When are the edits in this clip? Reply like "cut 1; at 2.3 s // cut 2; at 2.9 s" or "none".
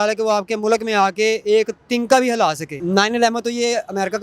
cut 1; at 2.8 s